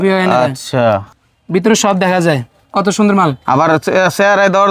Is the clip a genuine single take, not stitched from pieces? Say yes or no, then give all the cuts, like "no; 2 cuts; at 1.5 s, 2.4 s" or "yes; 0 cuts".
no; 1 cut; at 1.1 s